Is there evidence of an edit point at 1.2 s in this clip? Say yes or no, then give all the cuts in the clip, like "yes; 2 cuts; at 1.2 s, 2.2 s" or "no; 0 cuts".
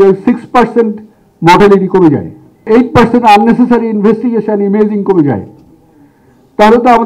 no; 1 cut; at 2.7 s